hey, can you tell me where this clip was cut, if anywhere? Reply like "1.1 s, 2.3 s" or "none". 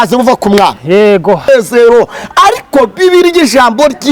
1.5 s